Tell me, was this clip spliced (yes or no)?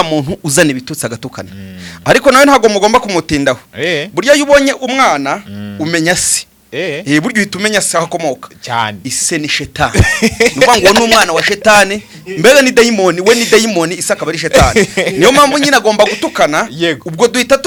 no